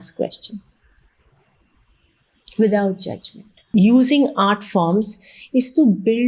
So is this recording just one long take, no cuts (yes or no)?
no